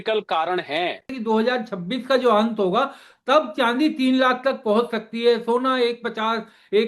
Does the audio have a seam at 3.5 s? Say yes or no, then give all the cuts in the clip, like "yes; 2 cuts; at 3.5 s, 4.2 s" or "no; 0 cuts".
no; 1 cut; at 1.1 s